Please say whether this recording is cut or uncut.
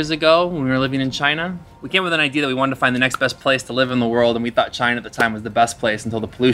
cut